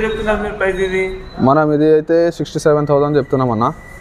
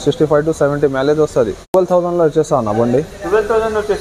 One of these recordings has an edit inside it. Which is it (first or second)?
second